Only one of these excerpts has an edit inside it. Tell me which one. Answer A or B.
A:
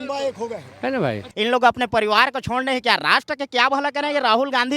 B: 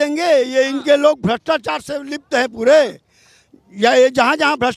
A